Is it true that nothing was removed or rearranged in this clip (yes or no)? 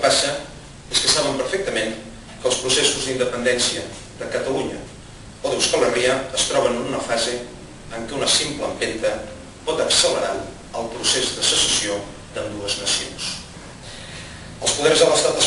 no